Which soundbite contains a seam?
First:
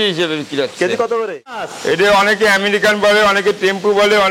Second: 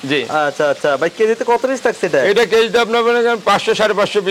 first; 1 cut; at 1.4 s

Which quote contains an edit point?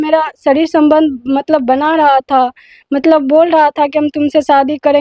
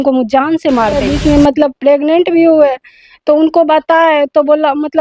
second; 1 cut; at 1.1 s

